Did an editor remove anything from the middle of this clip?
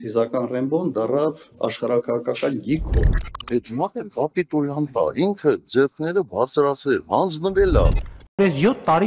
no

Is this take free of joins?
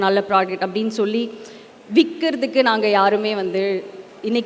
yes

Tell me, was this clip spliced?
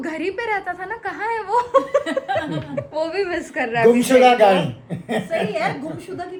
no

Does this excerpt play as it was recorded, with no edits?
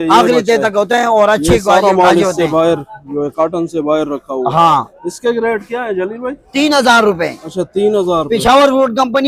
yes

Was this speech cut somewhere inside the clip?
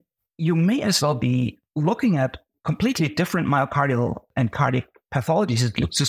yes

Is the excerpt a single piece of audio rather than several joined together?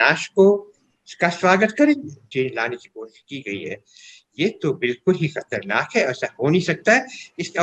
no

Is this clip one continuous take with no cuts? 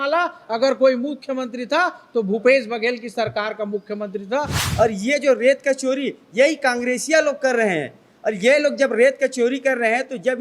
no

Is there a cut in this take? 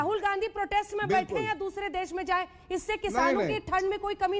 no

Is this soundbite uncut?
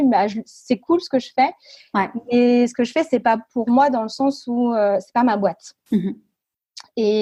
yes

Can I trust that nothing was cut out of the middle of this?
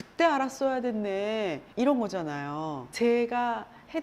no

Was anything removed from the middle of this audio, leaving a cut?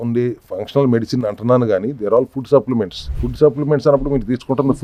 no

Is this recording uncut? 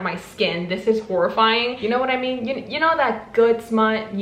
no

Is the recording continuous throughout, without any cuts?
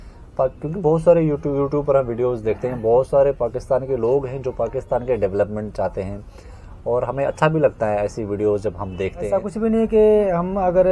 no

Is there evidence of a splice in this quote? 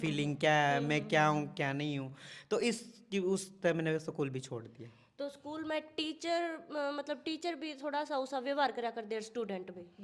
no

